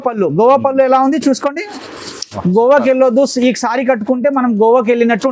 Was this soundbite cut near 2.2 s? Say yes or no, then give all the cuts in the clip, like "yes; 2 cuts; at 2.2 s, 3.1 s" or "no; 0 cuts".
no; 0 cuts